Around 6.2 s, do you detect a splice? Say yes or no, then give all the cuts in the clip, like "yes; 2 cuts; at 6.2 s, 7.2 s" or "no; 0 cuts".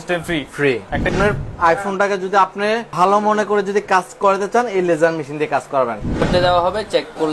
yes; 3 cuts; at 0.8 s, 2.9 s, 6.2 s